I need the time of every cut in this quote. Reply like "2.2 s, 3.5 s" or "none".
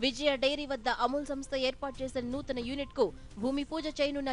none